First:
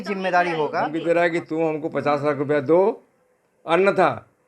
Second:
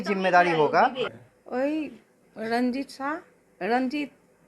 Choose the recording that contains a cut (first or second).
first